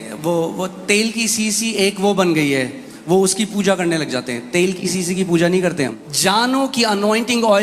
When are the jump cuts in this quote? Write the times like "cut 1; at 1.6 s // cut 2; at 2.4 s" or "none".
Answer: cut 1; at 6.0 s